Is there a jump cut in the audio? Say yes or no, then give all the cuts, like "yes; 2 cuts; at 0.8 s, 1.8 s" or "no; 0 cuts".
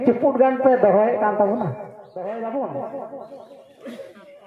yes; 1 cut; at 2.0 s